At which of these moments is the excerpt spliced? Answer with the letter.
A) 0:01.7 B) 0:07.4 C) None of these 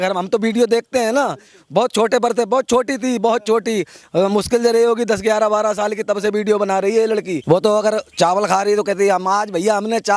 B